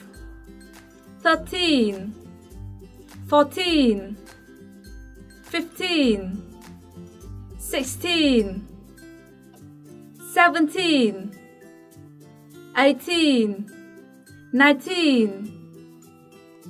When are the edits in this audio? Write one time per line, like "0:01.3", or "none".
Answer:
0:15.7